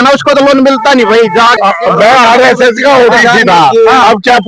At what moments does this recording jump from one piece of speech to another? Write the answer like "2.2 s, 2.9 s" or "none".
1.6 s